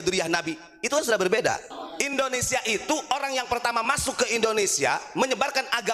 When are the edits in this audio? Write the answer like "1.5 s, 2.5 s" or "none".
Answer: 1.8 s